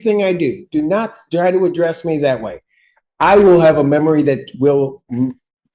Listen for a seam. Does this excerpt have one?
no; 0 cuts

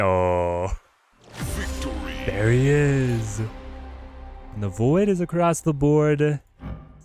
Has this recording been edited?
no; 0 cuts

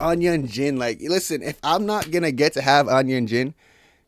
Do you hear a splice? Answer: no; 0 cuts

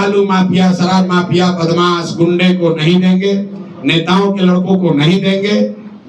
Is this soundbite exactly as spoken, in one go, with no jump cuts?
yes; 0 cuts

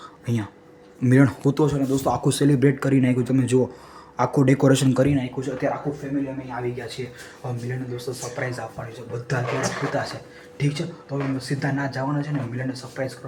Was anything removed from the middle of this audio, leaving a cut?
no; 0 cuts

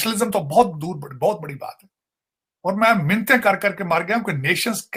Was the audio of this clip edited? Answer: no; 0 cuts

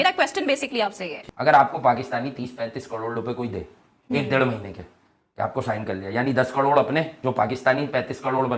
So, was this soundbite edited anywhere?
yes; 1 cut; at 1.4 s

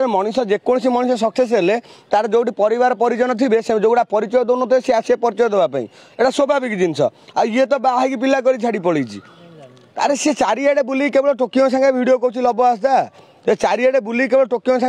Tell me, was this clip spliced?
yes; 1 cut; at 9.9 s

